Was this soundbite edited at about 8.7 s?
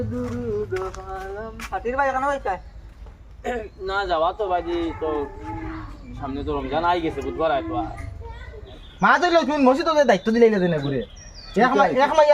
yes; 1 cut; at 8.7 s

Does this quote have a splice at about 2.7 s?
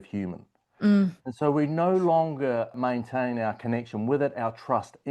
yes; 1 cut; at 2.7 s

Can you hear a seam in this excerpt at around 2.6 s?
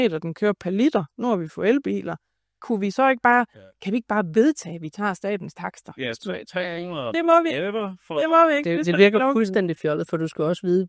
yes; 1 cut; at 2.6 s

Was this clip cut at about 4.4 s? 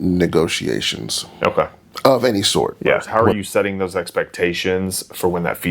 no; 1 cut; at 3.1 s

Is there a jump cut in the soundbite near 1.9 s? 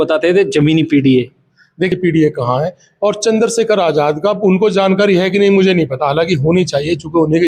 yes; 1 cut; at 1.9 s

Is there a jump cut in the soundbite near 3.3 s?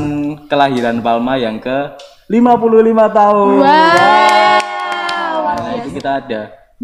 no; 1 cut; at 5.8 s

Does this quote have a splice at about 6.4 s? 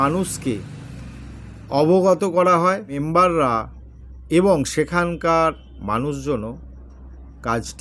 no; 1 cut; at 3.0 s

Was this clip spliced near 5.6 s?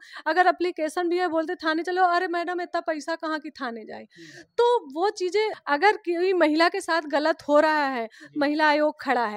yes; 1 cut; at 5.6 s

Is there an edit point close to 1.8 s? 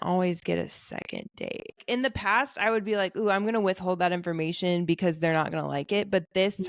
yes; 1 cut; at 1.8 s

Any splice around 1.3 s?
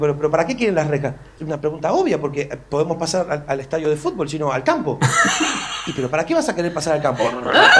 yes; 1 cut; at 1.3 s

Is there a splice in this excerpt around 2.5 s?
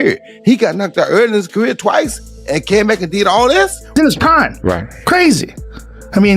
no; 1 cut; at 3.9 s

